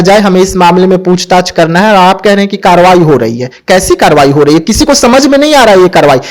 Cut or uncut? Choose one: uncut